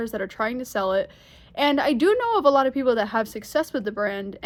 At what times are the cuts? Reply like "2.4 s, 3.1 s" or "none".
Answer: none